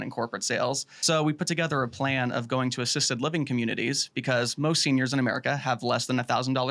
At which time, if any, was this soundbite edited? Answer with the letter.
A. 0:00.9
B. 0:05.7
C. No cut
A